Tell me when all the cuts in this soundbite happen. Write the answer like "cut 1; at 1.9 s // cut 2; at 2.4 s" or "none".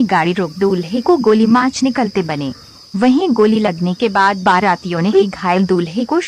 cut 1; at 0.9 s // cut 2; at 1.7 s